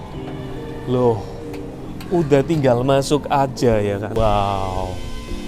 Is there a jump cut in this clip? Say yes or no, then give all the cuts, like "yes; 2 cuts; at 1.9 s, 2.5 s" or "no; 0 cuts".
yes; 1 cut; at 4.2 s